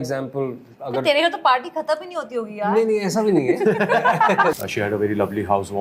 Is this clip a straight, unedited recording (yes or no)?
no